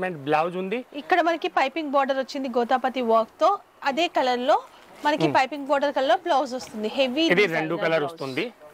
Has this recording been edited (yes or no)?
no